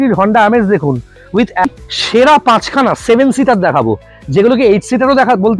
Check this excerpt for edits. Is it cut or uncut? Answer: cut